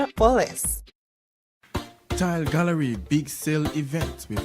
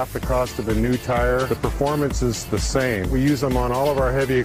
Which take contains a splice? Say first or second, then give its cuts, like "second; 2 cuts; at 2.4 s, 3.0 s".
first; 1 cut; at 1.4 s